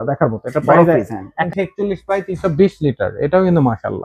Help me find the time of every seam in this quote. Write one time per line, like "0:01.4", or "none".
0:01.4